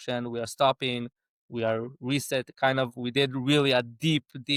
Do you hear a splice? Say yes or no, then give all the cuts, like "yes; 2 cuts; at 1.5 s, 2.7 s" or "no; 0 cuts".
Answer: no; 0 cuts